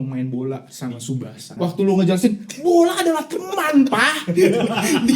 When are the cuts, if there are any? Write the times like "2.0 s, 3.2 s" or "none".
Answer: 1.5 s